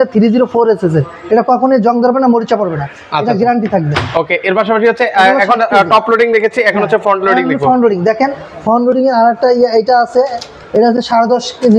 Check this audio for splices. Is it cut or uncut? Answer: uncut